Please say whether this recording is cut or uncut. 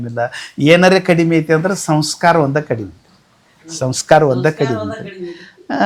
uncut